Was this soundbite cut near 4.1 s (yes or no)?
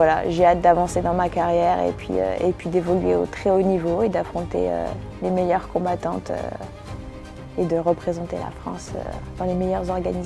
no